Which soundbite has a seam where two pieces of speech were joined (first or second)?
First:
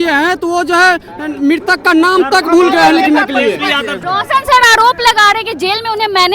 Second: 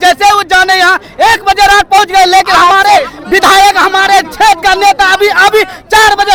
first